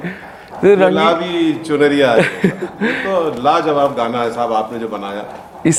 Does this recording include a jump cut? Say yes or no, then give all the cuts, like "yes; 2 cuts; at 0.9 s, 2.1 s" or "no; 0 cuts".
no; 0 cuts